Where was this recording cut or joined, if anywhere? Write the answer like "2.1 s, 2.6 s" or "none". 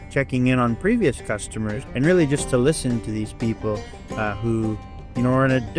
1.7 s

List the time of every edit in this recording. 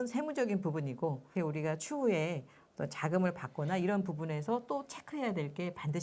1.3 s

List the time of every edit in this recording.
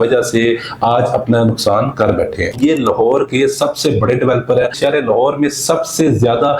2.5 s, 4.8 s

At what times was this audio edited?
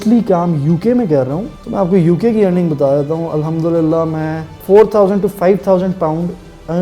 1.5 s

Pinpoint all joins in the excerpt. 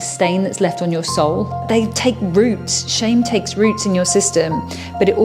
1.6 s

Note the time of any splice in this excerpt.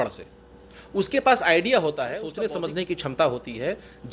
2.2 s

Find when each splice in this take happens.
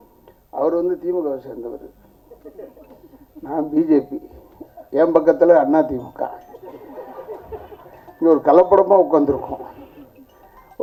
none

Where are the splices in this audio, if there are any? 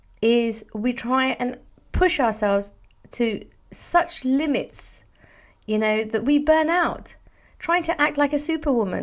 none

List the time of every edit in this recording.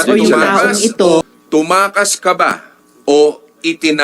1.2 s

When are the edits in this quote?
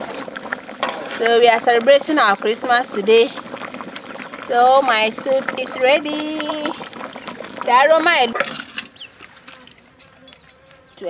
8.3 s

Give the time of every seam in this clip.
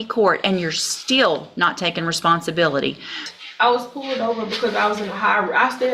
3.3 s

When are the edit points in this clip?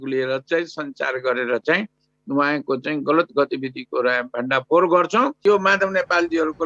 5.4 s

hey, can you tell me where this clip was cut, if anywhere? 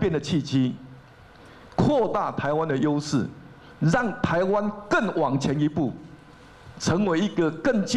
none

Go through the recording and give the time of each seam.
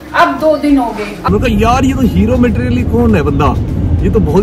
1.3 s

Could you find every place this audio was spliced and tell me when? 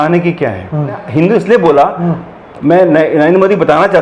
1.0 s

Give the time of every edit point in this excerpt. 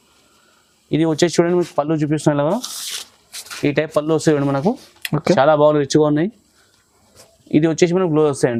none

